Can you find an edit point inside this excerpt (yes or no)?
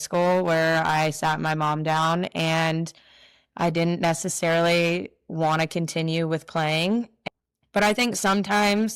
yes